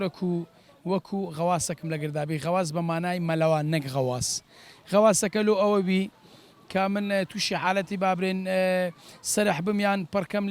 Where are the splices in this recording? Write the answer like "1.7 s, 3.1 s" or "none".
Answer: none